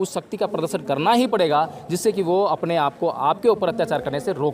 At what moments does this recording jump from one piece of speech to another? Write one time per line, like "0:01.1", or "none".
none